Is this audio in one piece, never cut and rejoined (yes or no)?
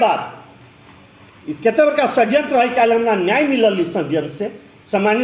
no